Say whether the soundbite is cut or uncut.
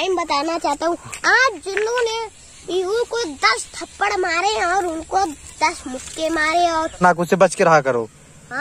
cut